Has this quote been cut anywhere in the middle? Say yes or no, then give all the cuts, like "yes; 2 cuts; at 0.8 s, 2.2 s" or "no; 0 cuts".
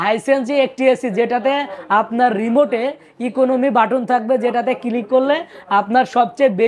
no; 0 cuts